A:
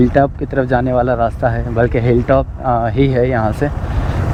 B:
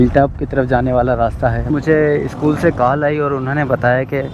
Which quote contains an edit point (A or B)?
B